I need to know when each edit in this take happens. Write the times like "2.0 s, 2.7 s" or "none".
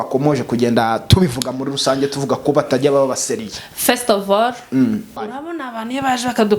5.3 s